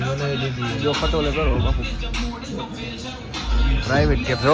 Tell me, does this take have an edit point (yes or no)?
no